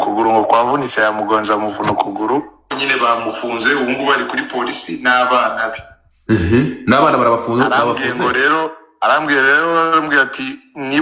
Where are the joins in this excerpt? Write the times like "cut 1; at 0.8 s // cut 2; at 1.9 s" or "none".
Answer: cut 1; at 2.7 s